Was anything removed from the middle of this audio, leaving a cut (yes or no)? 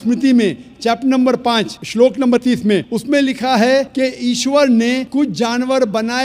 yes